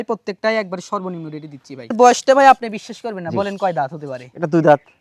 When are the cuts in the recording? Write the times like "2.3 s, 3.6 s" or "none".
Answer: 1.9 s

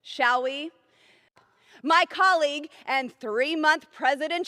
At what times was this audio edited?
1.4 s

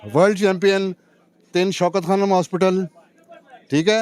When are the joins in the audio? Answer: none

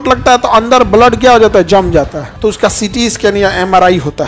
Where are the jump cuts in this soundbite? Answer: 2.2 s

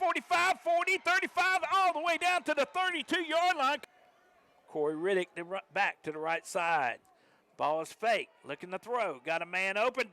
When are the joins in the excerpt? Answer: 3.9 s

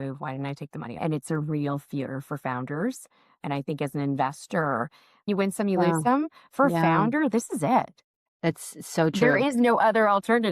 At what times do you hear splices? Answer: 1.0 s, 5.3 s

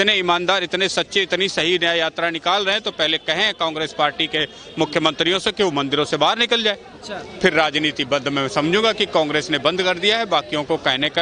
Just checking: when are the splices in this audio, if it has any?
none

